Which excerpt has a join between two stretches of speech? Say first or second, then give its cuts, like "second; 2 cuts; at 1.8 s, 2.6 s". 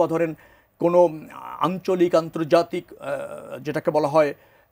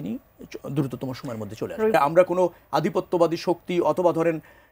second; 1 cut; at 1.9 s